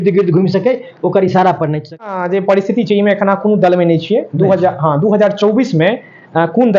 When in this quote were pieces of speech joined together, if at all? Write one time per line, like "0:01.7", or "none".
0:02.1